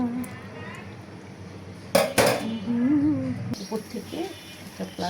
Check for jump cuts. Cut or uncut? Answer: cut